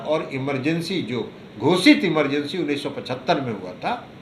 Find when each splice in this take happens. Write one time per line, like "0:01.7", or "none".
none